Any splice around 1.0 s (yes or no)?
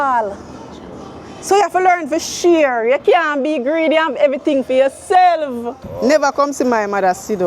no